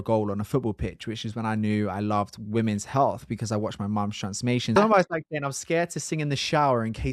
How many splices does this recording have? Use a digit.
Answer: 1